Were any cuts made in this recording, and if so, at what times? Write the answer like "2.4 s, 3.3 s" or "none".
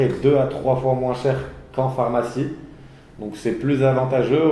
none